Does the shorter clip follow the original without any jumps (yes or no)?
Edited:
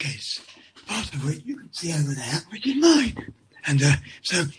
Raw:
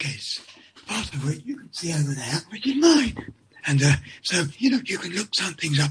yes